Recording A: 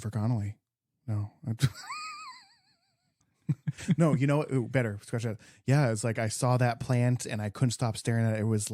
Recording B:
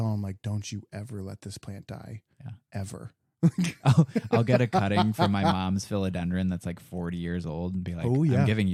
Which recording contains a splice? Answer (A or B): A